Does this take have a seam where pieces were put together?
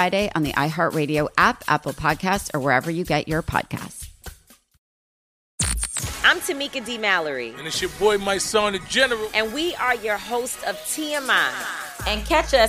yes; 1 cut; at 5.4 s

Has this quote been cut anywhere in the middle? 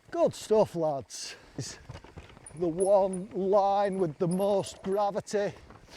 yes; 1 cut; at 1.8 s

